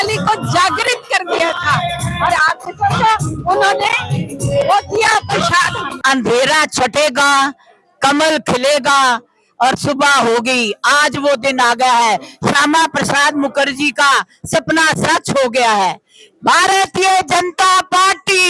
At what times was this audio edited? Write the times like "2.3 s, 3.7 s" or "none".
5.8 s